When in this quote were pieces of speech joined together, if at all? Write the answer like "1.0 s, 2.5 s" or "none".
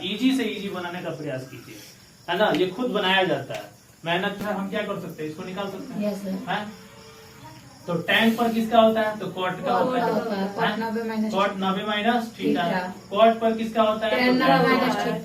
4.4 s